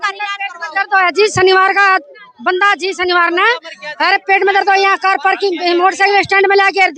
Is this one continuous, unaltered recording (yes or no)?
yes